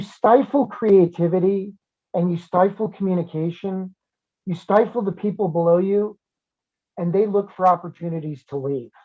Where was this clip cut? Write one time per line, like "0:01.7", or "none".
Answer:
0:04.1